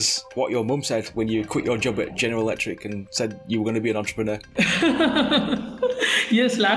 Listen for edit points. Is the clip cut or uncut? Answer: cut